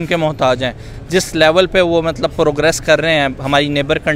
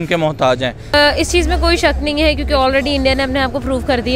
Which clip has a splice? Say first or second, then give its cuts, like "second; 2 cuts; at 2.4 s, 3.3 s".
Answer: second; 1 cut; at 0.9 s